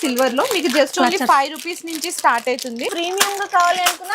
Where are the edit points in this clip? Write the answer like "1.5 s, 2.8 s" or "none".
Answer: 2.9 s

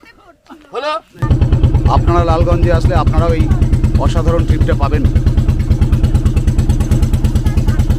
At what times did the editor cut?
1.2 s

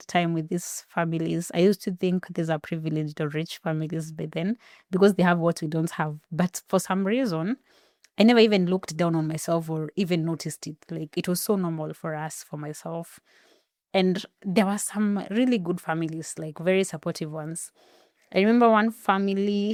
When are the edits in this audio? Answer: none

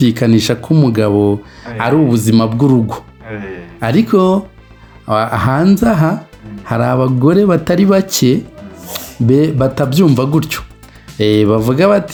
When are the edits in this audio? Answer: none

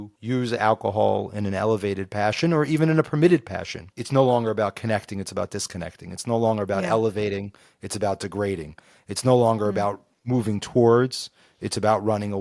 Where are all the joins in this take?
none

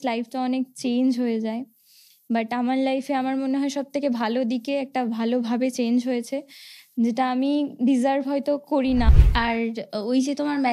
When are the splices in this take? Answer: 9.1 s

